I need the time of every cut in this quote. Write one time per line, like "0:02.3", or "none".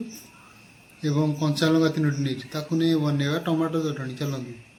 none

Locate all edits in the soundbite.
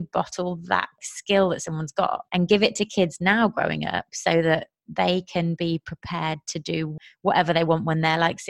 0:01.0
0:02.2
0:06.9

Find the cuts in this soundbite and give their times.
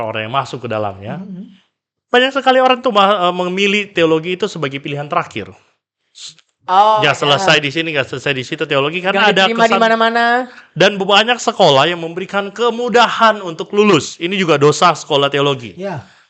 none

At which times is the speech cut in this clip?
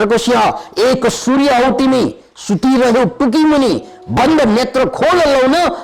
none

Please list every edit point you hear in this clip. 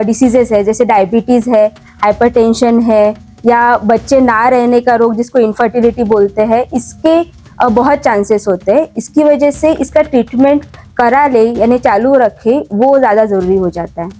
none

